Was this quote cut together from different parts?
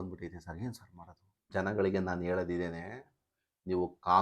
yes; 1 cut; at 1.5 s

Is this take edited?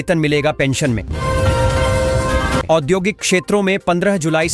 yes; 2 cuts; at 1.1 s, 2.6 s

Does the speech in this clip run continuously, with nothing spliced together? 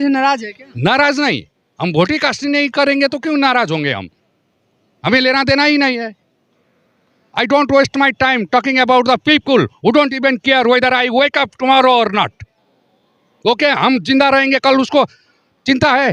yes; 0 cuts

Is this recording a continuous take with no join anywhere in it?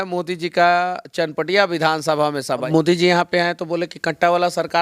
no; 1 cut; at 2.7 s

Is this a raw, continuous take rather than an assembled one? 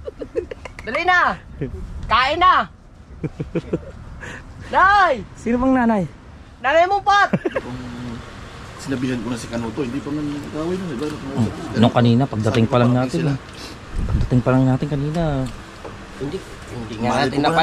no; 1 cut; at 7.6 s

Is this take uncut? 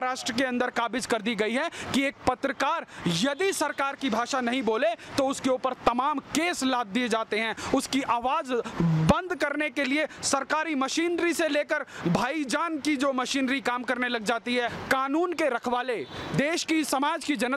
yes; 0 cuts

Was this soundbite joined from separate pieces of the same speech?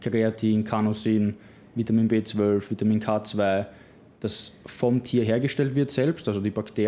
no; 0 cuts

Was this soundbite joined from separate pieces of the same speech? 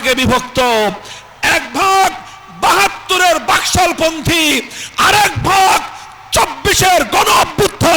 no; 0 cuts

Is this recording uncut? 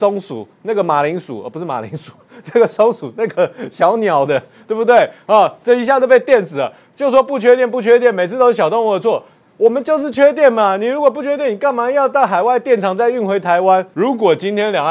no; 1 cut; at 13.9 s

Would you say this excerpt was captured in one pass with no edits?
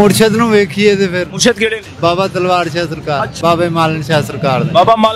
no; 2 cuts; at 1.9 s, 3.3 s

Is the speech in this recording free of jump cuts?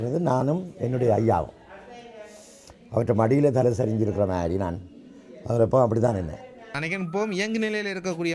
no; 1 cut; at 6.7 s

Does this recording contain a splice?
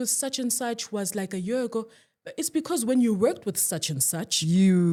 no; 0 cuts

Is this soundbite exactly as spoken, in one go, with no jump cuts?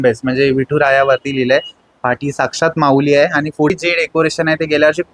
no; 1 cut; at 3.7 s

